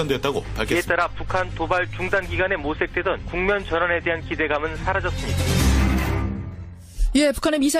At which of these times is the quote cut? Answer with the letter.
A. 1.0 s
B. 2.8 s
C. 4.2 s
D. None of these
D